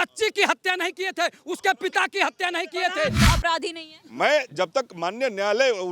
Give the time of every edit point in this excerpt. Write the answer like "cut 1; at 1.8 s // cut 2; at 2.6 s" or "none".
cut 1; at 3.2 s